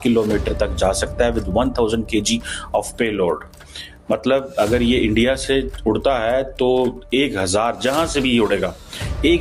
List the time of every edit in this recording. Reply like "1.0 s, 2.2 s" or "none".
none